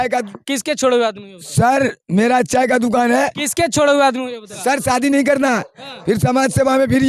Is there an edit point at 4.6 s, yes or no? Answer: yes